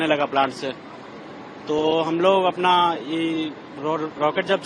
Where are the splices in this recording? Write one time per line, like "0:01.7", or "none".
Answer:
none